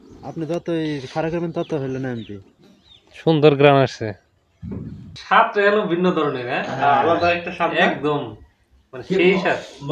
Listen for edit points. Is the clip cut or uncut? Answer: cut